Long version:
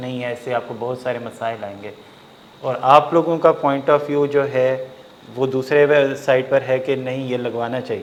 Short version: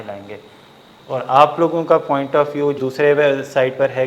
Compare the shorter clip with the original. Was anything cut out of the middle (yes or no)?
yes